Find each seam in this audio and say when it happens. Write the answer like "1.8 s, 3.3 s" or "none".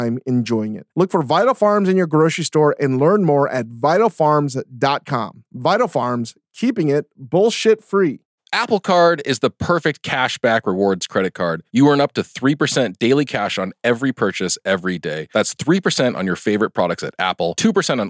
8.3 s